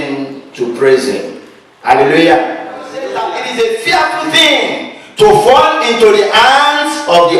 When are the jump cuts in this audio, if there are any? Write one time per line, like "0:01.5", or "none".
0:03.2